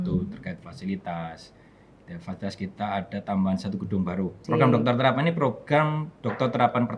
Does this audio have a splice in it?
yes; 1 cut; at 4.4 s

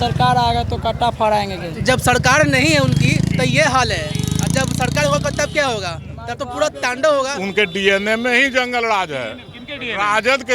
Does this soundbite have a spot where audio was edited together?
yes; 2 cuts; at 1.7 s, 7.4 s

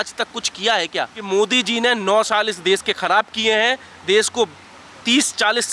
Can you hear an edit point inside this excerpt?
yes; 1 cut; at 1.2 s

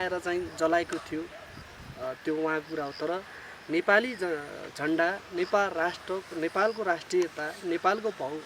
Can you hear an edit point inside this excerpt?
no; 0 cuts

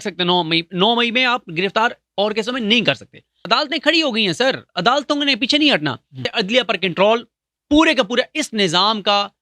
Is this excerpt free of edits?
no; 2 cuts; at 3.4 s, 6.3 s

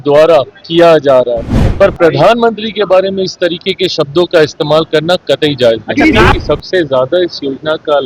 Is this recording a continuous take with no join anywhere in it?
no; 2 cuts; at 1.6 s, 6.3 s

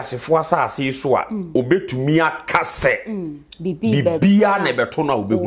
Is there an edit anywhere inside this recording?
no; 0 cuts

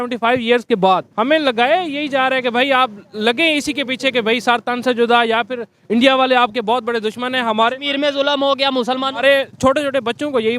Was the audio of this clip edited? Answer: yes; 1 cut; at 1.1 s

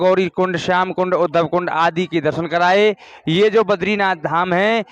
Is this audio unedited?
yes; 0 cuts

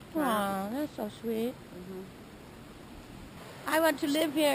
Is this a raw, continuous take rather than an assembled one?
no; 1 cut; at 3.4 s

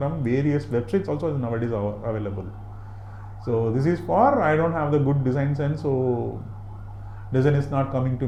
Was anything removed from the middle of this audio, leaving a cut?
no; 0 cuts

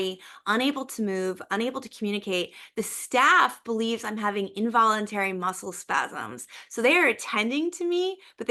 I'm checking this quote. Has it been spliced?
no; 0 cuts

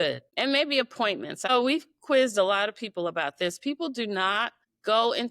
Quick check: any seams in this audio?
yes; 1 cut; at 1.5 s

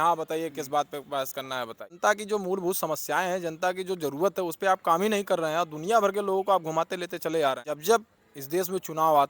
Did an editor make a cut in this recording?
yes; 2 cuts; at 2.0 s, 7.7 s

